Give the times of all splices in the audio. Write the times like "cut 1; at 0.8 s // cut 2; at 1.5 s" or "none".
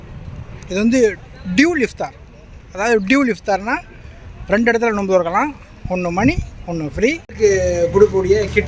cut 1; at 7.3 s